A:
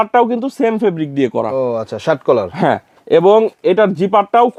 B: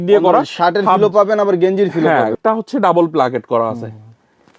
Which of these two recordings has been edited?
B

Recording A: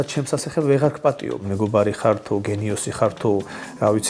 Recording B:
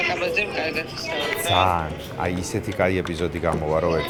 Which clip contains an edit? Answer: A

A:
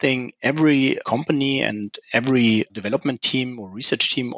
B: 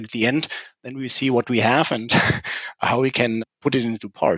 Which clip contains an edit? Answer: B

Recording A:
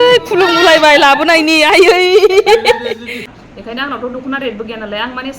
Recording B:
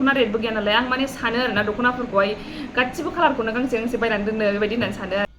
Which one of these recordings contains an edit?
A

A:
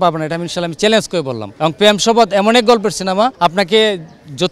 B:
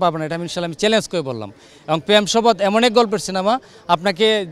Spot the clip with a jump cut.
A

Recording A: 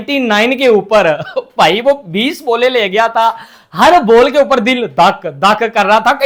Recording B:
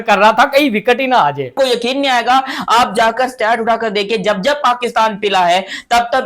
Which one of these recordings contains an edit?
B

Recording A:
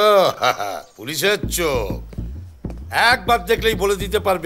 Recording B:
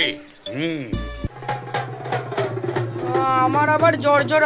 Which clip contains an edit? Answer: B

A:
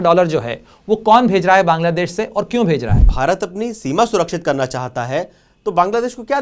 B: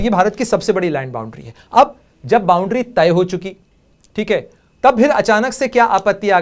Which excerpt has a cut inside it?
A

